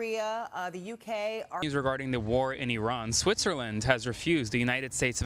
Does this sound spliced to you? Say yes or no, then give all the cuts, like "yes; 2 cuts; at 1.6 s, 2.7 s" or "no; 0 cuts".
yes; 1 cut; at 1.6 s